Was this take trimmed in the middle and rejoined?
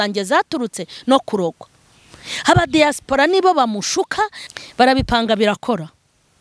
yes; 1 cut; at 4.4 s

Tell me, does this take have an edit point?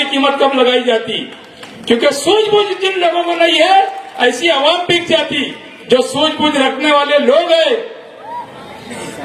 no; 0 cuts

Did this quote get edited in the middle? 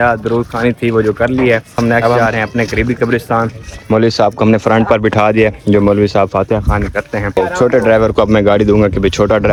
no; 0 cuts

